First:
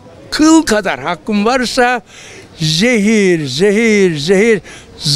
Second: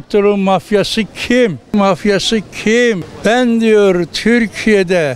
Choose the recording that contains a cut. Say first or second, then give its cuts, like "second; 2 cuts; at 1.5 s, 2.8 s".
second; 2 cuts; at 1.7 s, 3.1 s